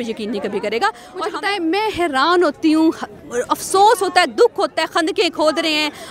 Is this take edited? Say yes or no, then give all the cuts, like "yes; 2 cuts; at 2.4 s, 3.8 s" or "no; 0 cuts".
yes; 1 cut; at 1.1 s